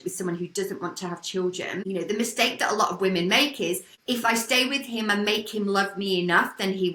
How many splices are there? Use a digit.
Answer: 0